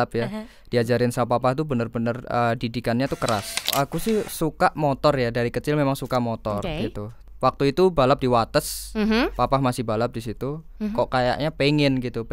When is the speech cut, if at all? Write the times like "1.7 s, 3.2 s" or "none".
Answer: 3.7 s, 7.2 s, 10.8 s